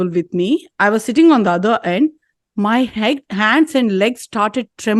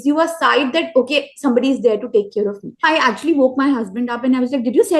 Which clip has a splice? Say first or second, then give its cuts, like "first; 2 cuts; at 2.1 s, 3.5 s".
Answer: second; 1 cut; at 2.8 s